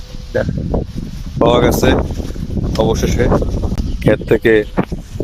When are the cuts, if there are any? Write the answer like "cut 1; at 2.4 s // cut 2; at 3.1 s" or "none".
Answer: cut 1; at 3.7 s